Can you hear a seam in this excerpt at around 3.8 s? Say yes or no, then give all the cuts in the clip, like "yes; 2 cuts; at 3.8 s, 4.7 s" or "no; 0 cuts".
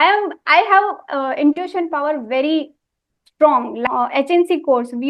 yes; 1 cut; at 3.8 s